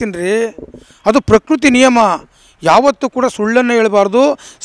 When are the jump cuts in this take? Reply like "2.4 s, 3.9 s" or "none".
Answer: none

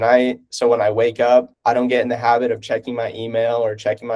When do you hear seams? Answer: 1.5 s

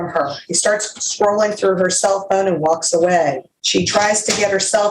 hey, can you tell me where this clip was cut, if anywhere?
3.5 s

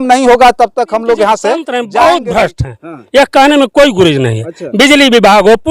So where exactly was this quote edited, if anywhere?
1.8 s

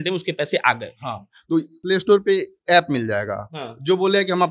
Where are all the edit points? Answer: 1.8 s

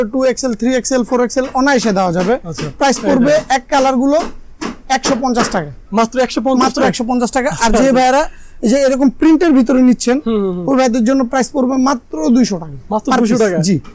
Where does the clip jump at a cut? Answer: none

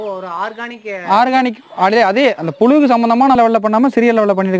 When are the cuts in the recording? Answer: 3.4 s

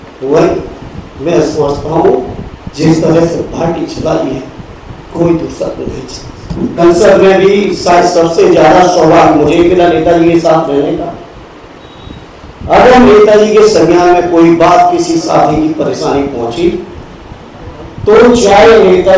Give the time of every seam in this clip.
6.8 s

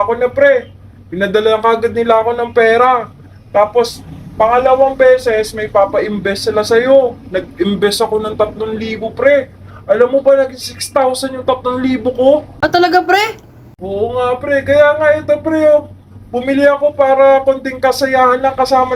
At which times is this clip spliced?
13.7 s

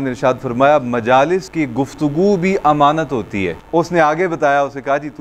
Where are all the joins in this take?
1.5 s, 3.6 s

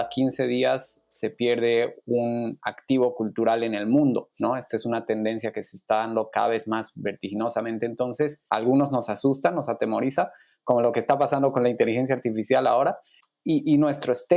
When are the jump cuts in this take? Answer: 4.3 s, 8.4 s, 13.2 s

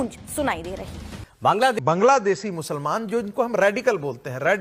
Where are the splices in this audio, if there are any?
1.8 s

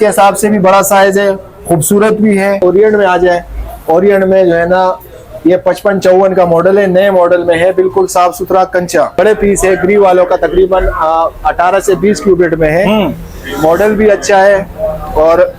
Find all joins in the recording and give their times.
2.6 s, 9.1 s

